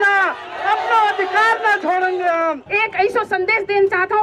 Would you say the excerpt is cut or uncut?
cut